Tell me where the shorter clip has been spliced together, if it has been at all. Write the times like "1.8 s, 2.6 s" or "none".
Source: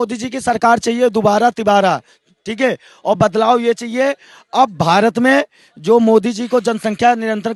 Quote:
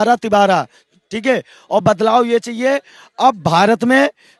none